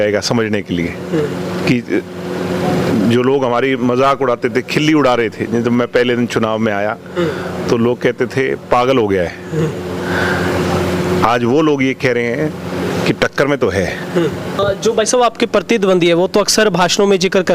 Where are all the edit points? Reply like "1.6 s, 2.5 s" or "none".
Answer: 14.6 s

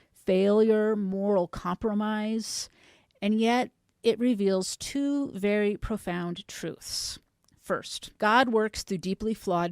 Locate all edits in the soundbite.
8.0 s

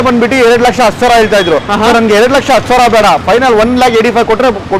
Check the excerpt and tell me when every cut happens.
none

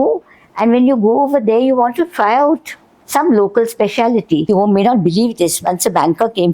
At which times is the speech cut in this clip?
4.5 s

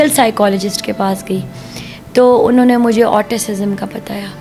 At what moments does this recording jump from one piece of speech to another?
none

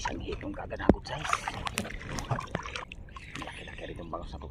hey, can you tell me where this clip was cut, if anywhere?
2.9 s

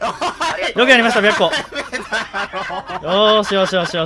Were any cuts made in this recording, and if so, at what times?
none

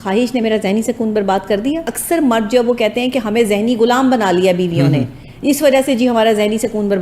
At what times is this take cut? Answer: 1.9 s

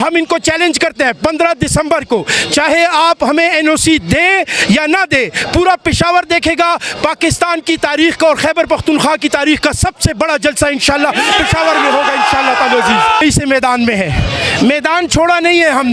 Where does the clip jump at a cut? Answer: 13.2 s

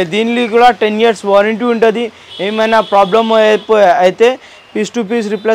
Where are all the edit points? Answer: none

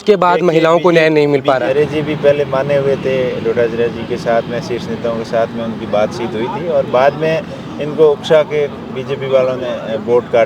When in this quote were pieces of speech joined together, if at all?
1.7 s

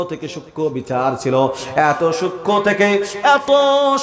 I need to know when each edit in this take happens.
none

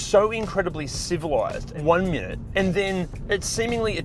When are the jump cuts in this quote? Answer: 1.7 s, 2.4 s, 3.2 s

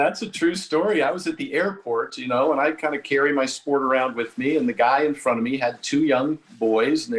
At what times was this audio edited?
none

